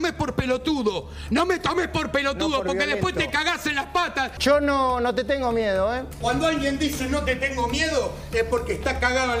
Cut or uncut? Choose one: cut